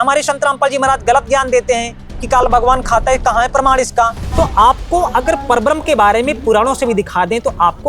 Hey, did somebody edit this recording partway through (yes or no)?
yes